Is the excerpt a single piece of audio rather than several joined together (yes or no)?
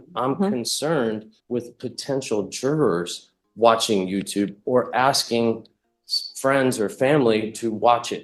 no